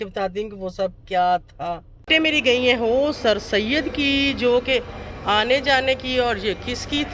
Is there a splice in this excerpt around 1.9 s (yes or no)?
yes